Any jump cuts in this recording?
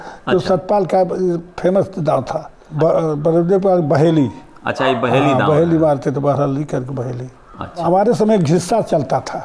yes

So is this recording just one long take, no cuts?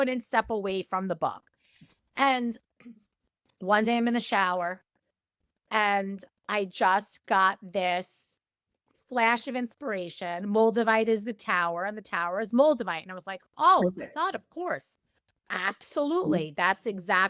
yes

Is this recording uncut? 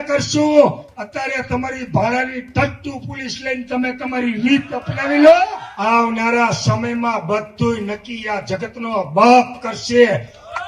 no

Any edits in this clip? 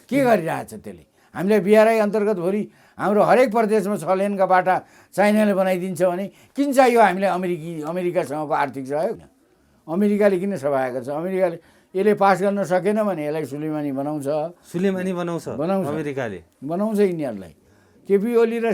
yes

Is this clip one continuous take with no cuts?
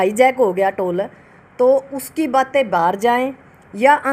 yes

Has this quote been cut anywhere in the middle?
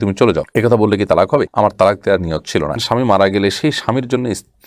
yes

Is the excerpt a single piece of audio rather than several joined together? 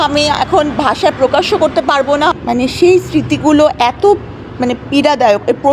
no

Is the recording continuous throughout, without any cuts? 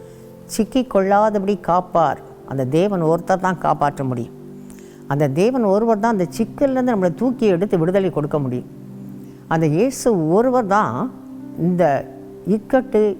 yes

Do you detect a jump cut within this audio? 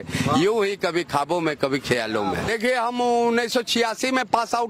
yes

